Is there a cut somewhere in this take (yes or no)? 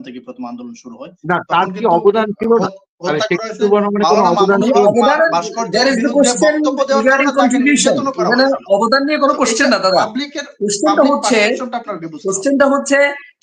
no